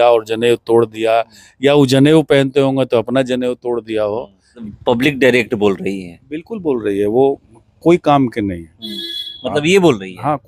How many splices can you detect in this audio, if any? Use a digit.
1